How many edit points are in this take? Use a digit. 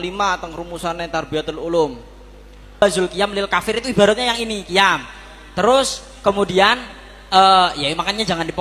1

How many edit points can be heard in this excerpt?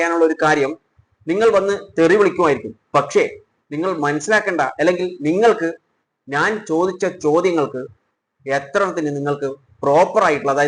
0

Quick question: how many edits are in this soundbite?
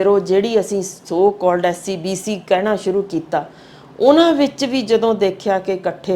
0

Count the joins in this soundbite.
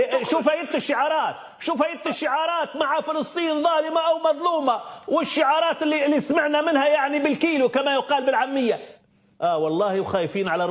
1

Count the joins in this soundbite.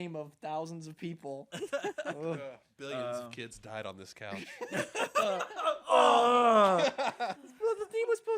2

